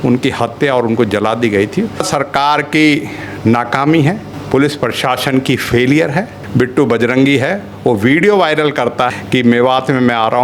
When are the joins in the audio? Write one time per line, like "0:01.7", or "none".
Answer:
0:02.1
0:04.3
0:06.4
0:09.1